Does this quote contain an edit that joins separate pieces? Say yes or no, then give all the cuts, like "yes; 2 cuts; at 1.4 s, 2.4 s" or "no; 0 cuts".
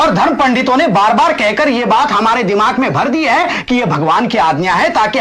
no; 0 cuts